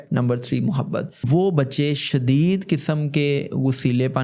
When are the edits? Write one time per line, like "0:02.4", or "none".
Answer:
0:01.2